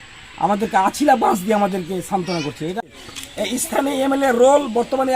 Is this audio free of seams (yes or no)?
no